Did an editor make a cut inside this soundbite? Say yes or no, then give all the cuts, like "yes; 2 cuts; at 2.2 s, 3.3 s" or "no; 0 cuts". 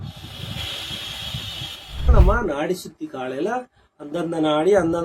yes; 1 cut; at 2.1 s